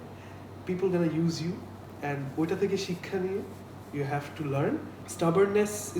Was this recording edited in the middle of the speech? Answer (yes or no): yes